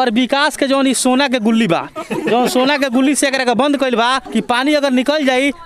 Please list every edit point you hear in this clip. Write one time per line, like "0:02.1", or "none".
none

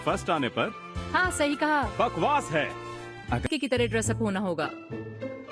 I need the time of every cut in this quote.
0:03.4

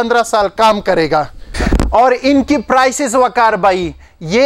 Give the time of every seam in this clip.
none

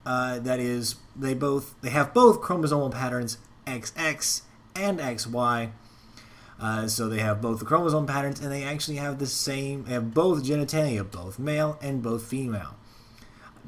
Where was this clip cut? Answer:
0:07.2

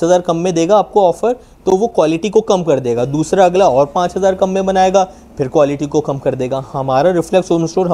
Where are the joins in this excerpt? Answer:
none

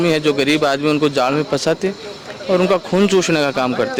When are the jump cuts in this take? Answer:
none

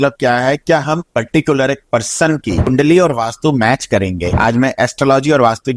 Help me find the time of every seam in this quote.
0:02.7
0:04.3

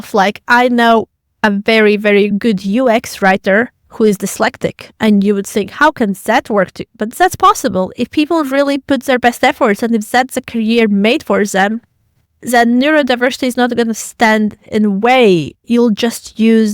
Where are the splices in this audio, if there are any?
0:15.6

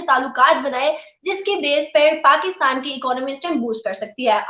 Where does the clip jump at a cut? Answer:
none

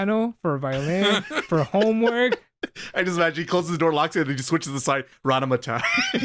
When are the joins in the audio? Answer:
0:02.5

